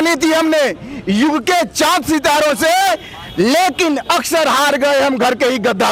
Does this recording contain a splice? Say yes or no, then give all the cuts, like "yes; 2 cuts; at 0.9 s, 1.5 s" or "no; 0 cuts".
no; 0 cuts